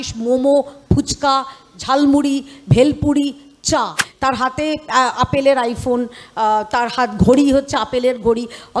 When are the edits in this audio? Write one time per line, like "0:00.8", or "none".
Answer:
0:04.1